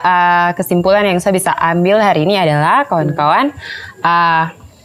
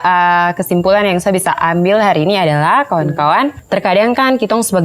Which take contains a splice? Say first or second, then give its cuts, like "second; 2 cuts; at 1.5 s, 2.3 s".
second; 1 cut; at 3.6 s